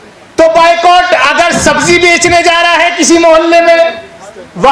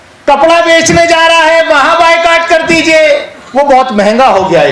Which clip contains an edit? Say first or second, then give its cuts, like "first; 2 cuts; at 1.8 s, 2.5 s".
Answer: second; 1 cut; at 3.4 s